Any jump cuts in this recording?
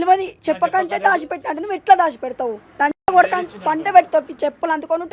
no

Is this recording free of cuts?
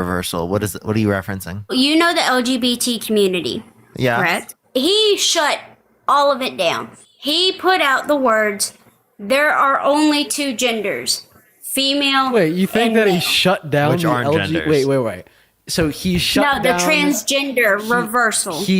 no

